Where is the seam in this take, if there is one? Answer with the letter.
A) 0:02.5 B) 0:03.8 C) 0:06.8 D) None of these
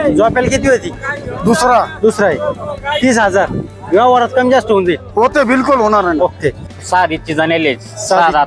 C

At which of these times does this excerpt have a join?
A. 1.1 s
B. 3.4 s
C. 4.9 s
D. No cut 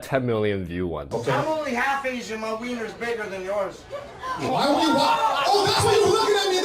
A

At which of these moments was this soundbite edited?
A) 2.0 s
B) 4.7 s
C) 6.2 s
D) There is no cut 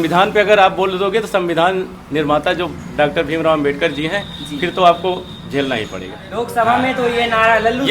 C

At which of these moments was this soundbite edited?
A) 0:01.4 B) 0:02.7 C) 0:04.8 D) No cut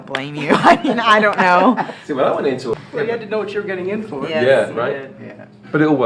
B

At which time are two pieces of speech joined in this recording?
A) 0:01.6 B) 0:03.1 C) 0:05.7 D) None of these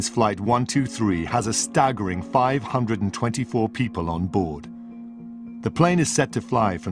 A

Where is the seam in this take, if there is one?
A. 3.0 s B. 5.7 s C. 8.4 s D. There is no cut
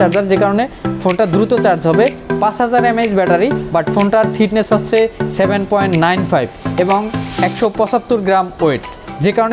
D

